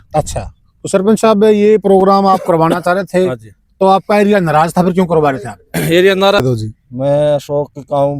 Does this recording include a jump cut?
yes; 1 cut; at 6.4 s

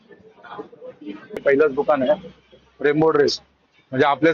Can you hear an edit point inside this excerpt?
yes; 1 cut; at 1.4 s

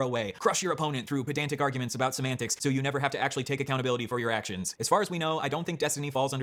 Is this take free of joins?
yes; 0 cuts

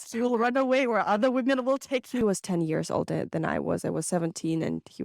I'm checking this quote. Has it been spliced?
yes; 1 cut; at 2.2 s

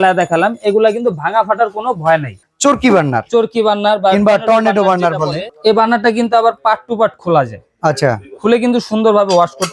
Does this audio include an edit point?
yes; 2 cuts; at 2.4 s, 5.4 s

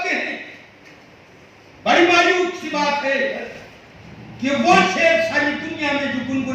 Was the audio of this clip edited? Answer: no; 0 cuts

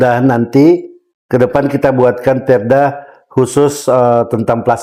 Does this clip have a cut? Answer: no; 0 cuts

